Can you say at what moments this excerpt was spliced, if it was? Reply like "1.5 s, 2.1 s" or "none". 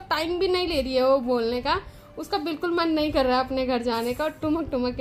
none